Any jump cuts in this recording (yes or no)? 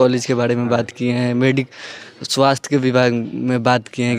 no